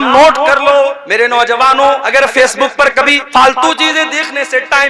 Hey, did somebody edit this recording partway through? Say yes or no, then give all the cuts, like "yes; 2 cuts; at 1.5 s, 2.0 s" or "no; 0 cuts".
yes; 3 cuts; at 1.0 s, 2.0 s, 3.2 s